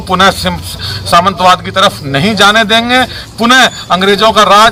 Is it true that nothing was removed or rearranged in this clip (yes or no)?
yes